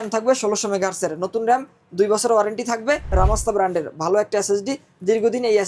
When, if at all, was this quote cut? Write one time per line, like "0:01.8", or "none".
0:03.1